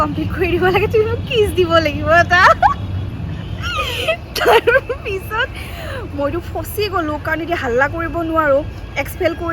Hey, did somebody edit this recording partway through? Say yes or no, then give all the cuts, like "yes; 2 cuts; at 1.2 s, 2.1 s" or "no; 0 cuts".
no; 0 cuts